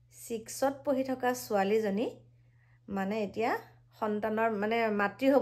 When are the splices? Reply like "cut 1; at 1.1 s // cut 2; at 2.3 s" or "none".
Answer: none